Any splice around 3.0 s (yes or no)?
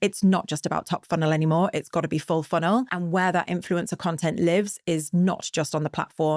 yes